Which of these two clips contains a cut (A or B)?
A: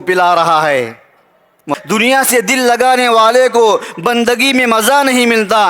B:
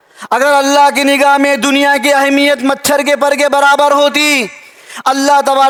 A